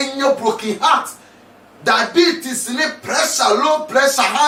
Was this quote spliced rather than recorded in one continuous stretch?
no; 0 cuts

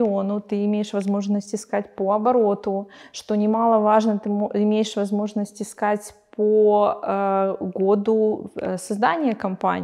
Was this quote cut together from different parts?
no; 0 cuts

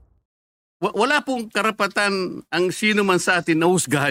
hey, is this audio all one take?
yes; 0 cuts

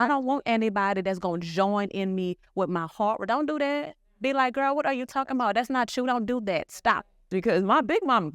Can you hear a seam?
yes; 1 cut; at 7.2 s

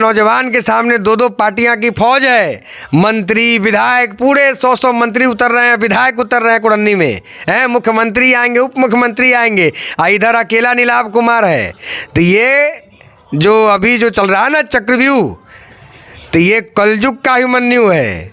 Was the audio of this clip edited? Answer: no; 0 cuts

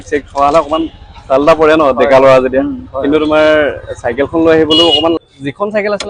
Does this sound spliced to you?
yes; 1 cut; at 5.2 s

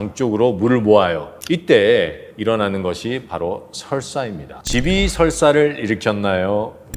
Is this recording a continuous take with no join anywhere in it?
no; 1 cut; at 4.5 s

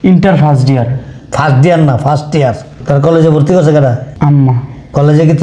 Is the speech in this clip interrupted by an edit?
yes; 2 cuts; at 2.7 s, 4.1 s

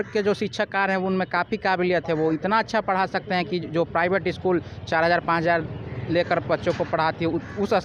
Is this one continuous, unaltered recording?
yes; 0 cuts

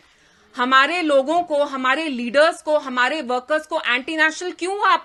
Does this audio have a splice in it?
no; 0 cuts

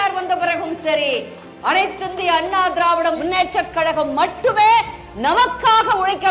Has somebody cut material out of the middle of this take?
yes; 1 cut; at 3.2 s

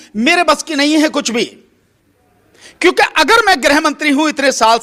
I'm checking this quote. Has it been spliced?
no; 0 cuts

